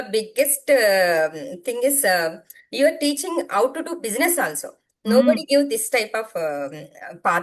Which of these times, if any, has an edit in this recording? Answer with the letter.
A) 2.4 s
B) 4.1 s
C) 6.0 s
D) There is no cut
D